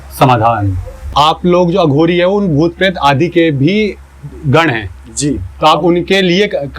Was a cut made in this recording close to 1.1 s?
yes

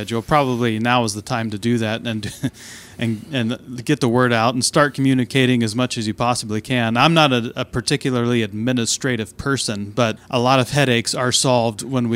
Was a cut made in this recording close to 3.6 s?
no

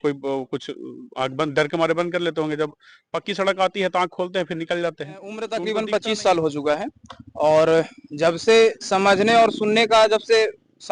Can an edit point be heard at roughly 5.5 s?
yes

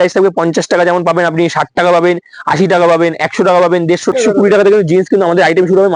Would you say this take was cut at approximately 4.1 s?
yes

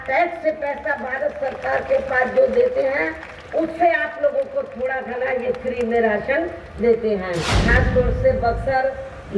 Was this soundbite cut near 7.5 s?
yes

